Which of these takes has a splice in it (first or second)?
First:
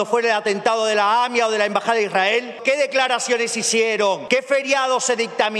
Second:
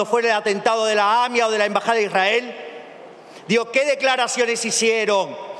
first